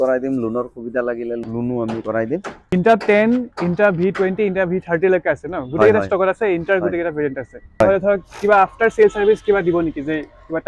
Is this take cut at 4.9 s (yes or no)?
no